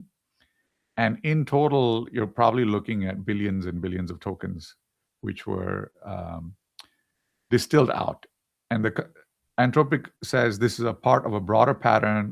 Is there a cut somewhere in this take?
yes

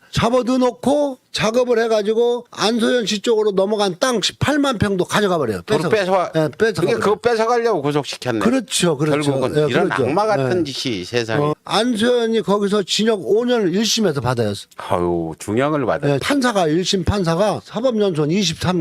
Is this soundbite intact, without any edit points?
no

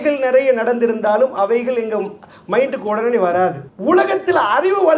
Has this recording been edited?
yes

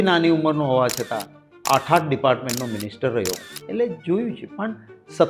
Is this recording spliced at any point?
yes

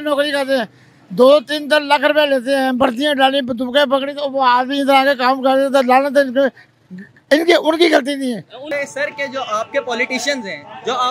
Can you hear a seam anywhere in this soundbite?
yes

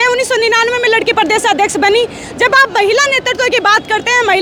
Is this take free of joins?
yes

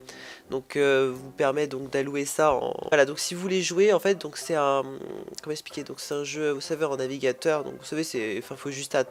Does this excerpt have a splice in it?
no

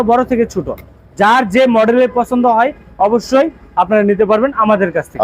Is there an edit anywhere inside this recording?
no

